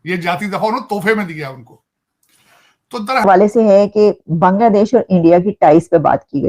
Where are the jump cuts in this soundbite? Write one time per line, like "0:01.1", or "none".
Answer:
0:03.2